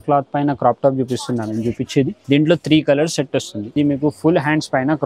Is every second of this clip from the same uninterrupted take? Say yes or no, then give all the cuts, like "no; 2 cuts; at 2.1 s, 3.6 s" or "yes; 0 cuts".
no; 2 cuts; at 2.2 s, 3.6 s